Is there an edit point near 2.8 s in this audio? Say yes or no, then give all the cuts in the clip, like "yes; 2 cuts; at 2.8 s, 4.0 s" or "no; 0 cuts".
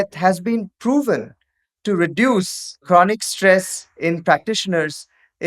yes; 1 cut; at 2.8 s